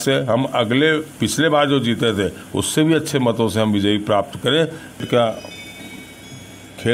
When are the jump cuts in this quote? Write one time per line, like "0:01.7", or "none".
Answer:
0:05.0